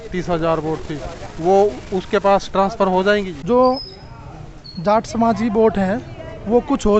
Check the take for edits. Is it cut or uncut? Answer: cut